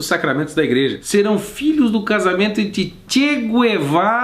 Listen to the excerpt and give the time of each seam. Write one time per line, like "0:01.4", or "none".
0:01.0